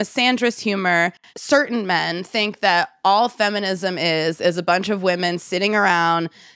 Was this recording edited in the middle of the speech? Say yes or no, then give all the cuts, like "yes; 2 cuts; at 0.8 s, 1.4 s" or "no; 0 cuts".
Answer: no; 0 cuts